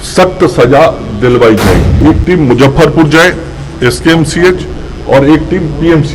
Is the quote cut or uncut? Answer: cut